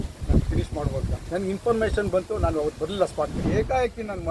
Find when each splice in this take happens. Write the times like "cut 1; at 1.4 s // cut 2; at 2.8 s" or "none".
cut 1; at 1.1 s // cut 2; at 3.4 s